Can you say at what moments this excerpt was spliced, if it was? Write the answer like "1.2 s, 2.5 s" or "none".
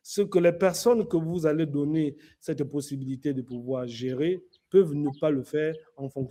none

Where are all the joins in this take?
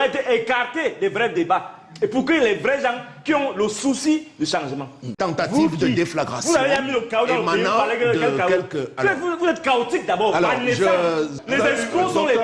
5.1 s, 11.4 s

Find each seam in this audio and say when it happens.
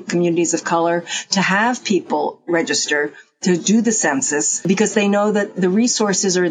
4.5 s

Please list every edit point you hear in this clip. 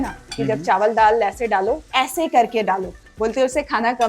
1.9 s, 3.0 s

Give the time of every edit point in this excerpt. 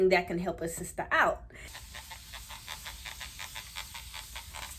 none

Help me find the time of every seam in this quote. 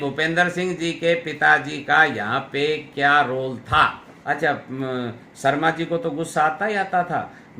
4.1 s

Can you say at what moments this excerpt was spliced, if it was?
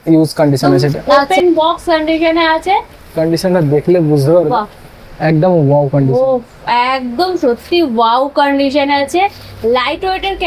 1.0 s

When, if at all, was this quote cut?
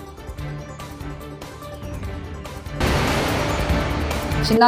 1.1 s

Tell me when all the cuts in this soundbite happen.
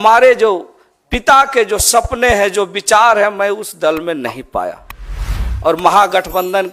none

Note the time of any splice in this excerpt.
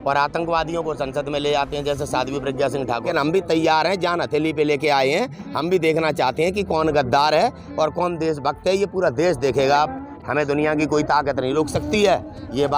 3.1 s, 10.1 s

